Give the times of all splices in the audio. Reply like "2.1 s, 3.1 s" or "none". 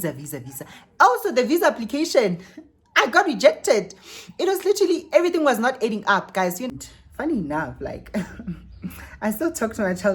6.8 s